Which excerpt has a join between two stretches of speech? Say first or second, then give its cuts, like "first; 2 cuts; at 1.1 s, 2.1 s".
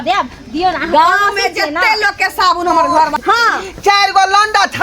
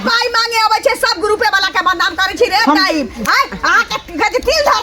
first; 1 cut; at 3.2 s